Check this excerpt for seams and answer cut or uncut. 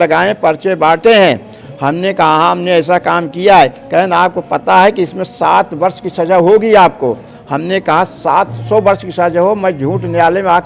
uncut